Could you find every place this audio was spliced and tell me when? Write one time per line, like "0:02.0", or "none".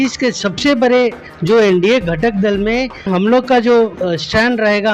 0:01.3
0:03.1